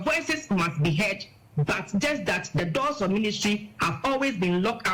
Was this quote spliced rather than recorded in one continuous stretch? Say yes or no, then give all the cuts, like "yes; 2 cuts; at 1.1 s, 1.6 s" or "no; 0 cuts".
no; 0 cuts